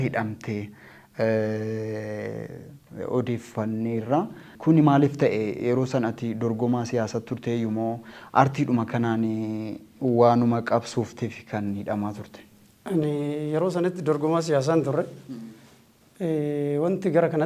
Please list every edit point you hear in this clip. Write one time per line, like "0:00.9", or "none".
0:04.5